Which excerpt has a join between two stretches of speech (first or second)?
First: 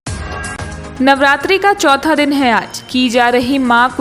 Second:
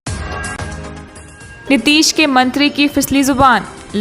first